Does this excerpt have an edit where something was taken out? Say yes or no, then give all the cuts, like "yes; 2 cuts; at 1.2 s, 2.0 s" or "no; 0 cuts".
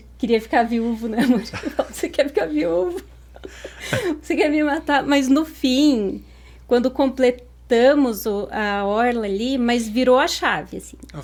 no; 0 cuts